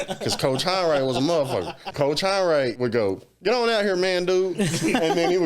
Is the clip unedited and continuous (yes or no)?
no